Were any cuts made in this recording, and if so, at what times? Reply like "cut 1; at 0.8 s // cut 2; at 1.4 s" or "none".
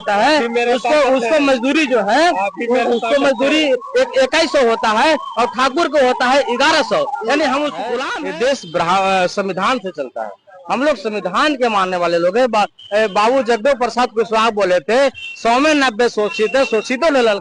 cut 1; at 8.0 s